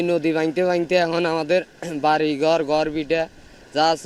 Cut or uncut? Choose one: uncut